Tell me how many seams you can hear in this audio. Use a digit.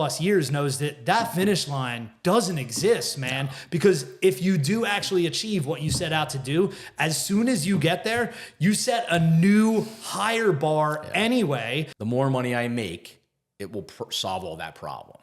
1